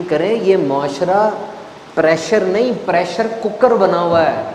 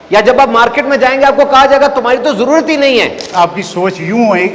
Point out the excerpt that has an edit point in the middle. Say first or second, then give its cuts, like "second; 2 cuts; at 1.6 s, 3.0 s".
second; 1 cut; at 3.3 s